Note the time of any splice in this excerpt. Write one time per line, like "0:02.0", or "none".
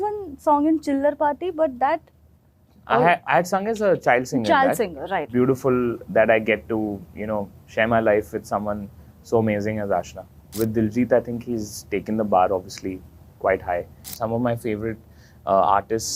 0:05.3
0:10.6
0:14.0